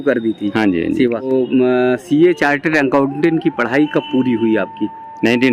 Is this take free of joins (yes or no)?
no